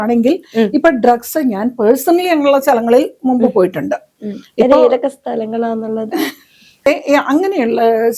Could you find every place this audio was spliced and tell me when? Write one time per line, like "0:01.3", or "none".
0:06.9